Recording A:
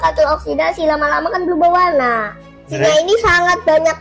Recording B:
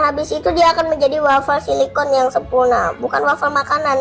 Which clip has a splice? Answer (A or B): A